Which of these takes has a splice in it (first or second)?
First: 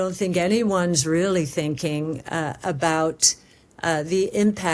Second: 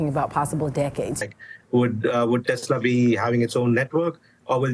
second